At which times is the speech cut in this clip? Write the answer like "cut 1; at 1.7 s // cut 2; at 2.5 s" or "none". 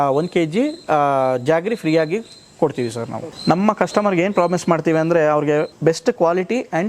cut 1; at 3.3 s // cut 2; at 5.7 s